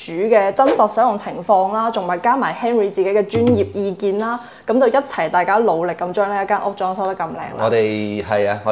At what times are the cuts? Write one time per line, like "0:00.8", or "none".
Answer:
none